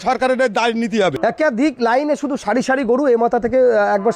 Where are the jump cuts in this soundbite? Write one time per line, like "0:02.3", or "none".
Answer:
0:01.2

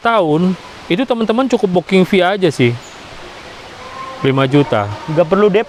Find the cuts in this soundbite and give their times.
none

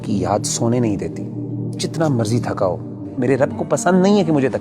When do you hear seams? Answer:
0:03.1

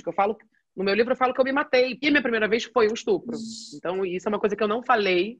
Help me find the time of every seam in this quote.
0:02.1

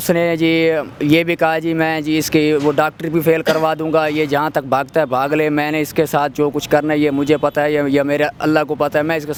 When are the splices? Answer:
none

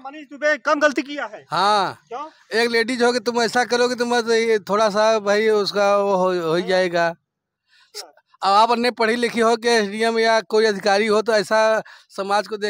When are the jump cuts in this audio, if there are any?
none

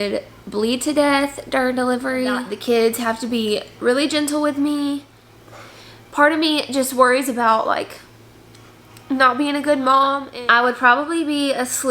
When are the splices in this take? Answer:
0:02.5
0:05.1
0:10.3

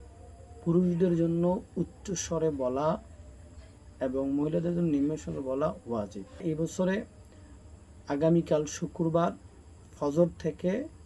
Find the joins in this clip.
0:06.4

